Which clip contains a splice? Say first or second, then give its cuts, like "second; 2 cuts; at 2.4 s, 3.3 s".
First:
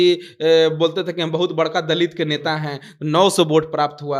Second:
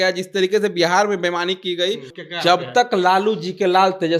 second; 1 cut; at 2.1 s